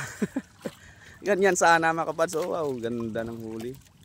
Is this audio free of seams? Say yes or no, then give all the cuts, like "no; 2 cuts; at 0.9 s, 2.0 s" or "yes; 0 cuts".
yes; 0 cuts